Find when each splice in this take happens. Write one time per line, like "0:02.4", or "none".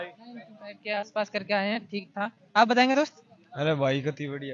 none